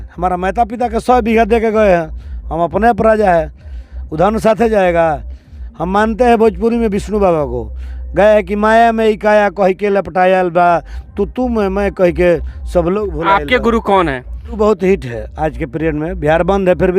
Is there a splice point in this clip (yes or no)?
yes